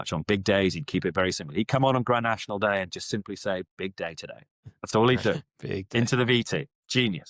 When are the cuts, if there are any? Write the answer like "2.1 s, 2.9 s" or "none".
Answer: none

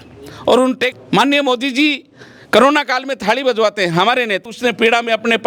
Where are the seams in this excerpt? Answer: 1.0 s, 4.4 s

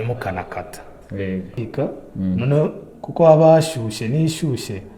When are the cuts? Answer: 1.8 s

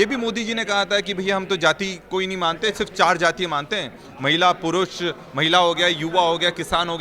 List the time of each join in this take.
none

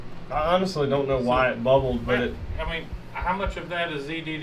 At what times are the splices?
none

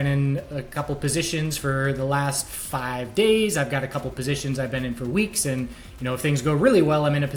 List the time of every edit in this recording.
none

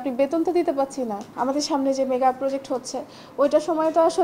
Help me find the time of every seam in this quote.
1.2 s

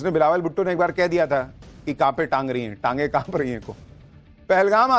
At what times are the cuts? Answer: 2.4 s

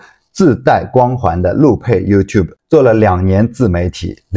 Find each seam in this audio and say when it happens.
none

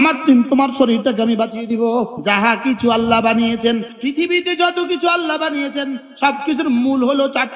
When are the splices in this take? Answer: 2.1 s, 3.9 s

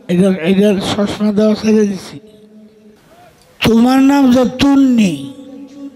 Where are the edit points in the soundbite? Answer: 3.0 s

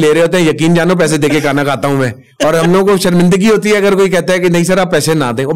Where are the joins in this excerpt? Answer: none

